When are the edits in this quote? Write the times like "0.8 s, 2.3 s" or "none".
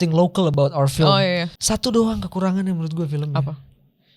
1.5 s